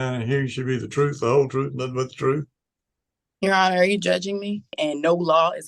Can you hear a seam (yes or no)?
yes